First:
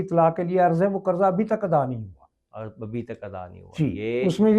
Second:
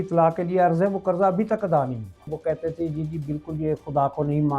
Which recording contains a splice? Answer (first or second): second